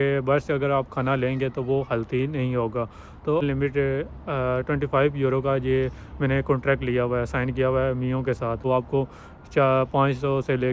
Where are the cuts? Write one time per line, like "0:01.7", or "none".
0:03.4
0:08.6